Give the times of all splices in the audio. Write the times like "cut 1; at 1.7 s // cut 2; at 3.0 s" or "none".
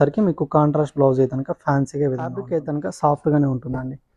cut 1; at 2.4 s